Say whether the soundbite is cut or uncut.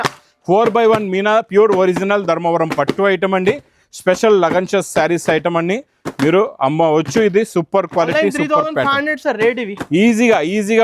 uncut